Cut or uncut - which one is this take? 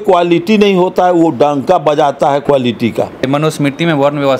cut